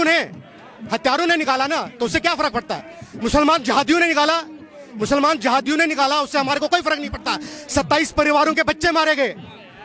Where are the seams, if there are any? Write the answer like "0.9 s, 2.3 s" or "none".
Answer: none